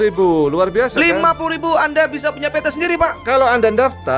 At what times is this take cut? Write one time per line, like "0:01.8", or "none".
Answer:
none